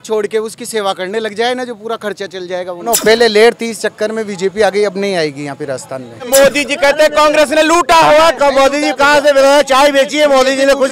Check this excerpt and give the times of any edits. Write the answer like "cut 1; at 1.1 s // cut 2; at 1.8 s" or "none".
cut 1; at 2.8 s // cut 2; at 6.3 s